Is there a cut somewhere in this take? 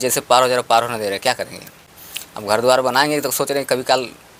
no; 0 cuts

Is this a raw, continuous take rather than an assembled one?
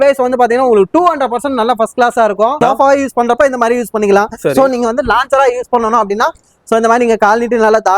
no; 1 cut; at 2.6 s

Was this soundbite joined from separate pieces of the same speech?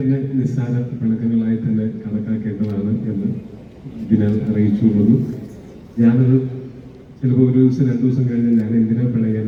no; 0 cuts

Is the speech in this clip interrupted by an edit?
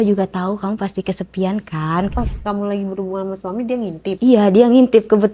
yes; 2 cuts; at 2.1 s, 4.2 s

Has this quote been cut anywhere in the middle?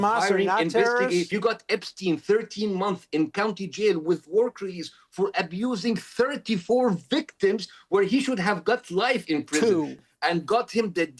yes; 2 cuts; at 1.3 s, 10.0 s

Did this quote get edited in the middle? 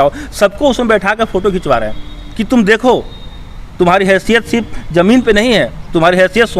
no; 0 cuts

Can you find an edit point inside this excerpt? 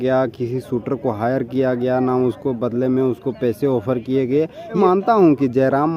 yes; 1 cut; at 4.8 s

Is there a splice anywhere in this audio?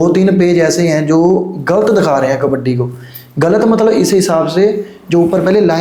no; 0 cuts

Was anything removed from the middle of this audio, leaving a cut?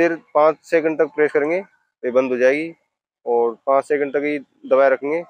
no; 0 cuts

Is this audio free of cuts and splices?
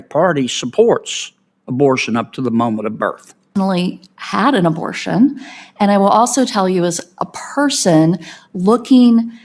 no; 1 cut; at 3.5 s

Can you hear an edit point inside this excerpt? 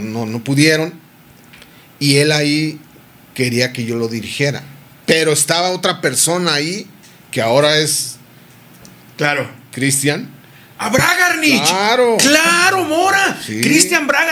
no; 0 cuts

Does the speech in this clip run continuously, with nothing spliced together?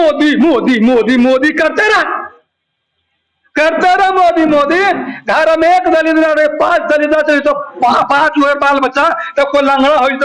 yes; 0 cuts

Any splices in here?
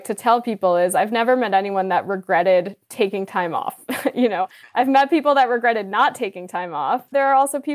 no; 0 cuts

